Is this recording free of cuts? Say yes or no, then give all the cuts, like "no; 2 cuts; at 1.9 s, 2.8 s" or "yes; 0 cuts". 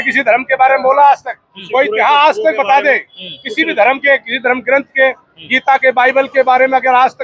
yes; 0 cuts